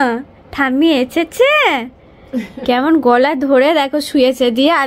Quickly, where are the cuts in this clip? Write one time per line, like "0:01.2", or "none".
none

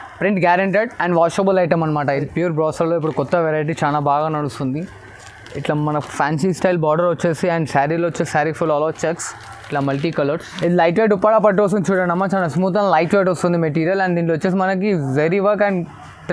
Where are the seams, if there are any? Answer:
0:02.2
0:10.5

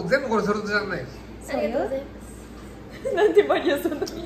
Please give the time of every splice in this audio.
none

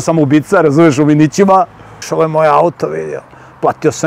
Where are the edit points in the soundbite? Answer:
0:02.0

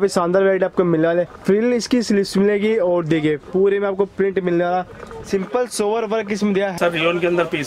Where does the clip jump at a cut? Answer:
0:01.3
0:06.8

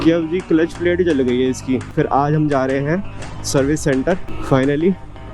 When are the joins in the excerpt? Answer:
0:01.9

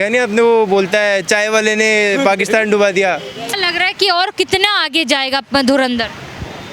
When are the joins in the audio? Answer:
0:03.5

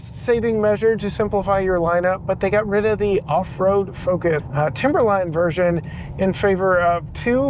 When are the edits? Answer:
0:04.5

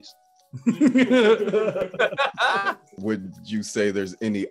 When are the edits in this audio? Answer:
0:03.0

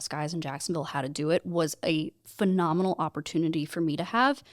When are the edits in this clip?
none

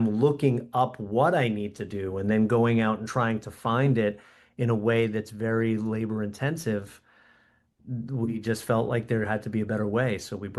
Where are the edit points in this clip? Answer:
none

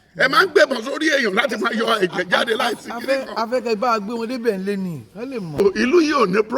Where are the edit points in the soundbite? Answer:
0:05.6

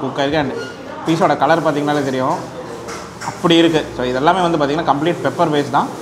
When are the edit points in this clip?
none

